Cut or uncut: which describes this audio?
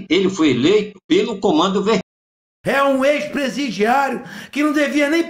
cut